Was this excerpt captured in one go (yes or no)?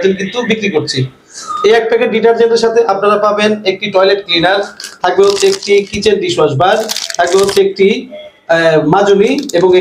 yes